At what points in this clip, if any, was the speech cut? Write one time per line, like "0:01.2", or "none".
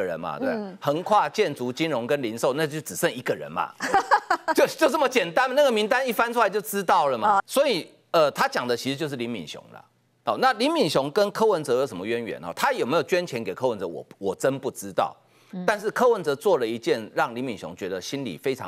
0:07.4